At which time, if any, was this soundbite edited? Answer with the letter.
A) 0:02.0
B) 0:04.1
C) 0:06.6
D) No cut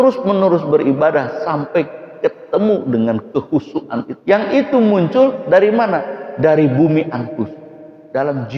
B